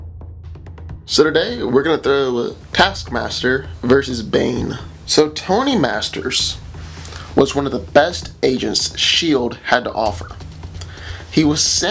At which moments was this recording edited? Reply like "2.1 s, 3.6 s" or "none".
none